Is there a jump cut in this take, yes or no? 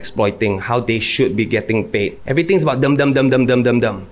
yes